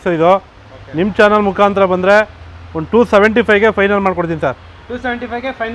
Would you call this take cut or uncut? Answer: uncut